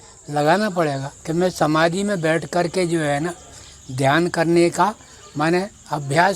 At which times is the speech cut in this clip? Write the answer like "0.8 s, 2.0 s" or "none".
1.1 s